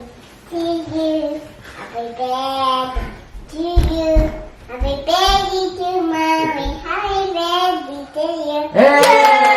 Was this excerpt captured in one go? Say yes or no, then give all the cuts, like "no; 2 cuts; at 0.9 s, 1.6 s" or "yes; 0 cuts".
yes; 0 cuts